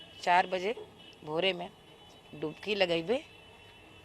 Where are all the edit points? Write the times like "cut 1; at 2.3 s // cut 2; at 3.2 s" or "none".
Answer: none